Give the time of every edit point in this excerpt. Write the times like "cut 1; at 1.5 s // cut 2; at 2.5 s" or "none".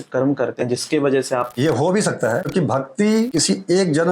cut 1; at 1.5 s // cut 2; at 2.5 s // cut 3; at 3.3 s

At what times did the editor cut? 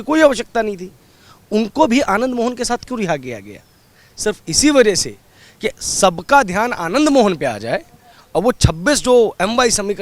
none

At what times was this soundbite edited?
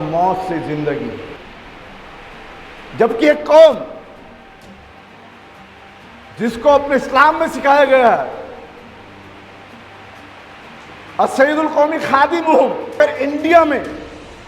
cut 1; at 1.4 s // cut 2; at 13.0 s

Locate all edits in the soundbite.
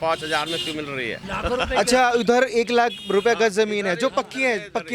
cut 1; at 1.2 s

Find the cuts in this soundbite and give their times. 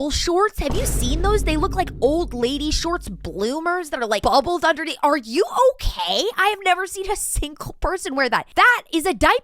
cut 1; at 8.5 s

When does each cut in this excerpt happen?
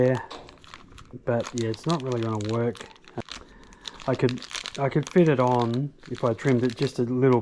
cut 1; at 3.1 s

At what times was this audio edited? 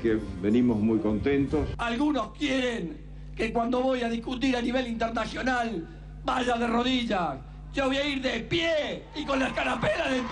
cut 1; at 1.8 s

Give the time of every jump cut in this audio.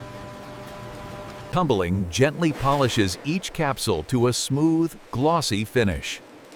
none

